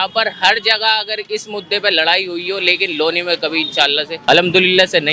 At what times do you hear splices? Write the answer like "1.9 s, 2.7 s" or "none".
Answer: 4.1 s